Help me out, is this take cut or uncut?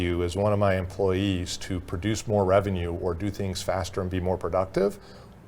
uncut